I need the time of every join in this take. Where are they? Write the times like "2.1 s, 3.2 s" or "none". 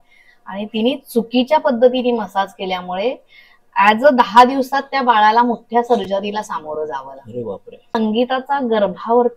7.9 s